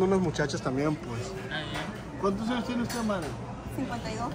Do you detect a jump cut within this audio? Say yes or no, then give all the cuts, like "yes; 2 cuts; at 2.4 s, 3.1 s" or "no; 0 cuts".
no; 0 cuts